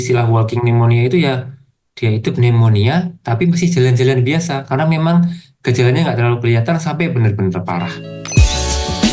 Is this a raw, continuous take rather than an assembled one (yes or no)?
no